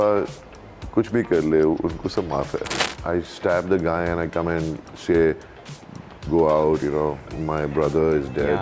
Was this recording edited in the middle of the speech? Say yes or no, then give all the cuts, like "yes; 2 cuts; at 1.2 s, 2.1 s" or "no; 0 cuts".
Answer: yes; 1 cut; at 2.8 s